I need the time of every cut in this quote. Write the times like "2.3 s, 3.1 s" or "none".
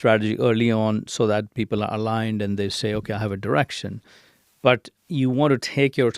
4.9 s